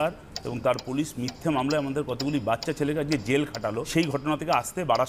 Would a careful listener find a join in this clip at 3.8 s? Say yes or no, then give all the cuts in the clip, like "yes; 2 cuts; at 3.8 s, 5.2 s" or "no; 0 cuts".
yes; 1 cut; at 3.8 s